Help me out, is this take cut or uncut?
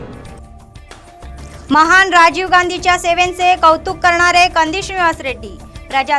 uncut